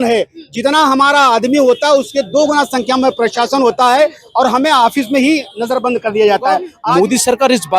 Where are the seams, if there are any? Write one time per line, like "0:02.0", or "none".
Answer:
0:06.8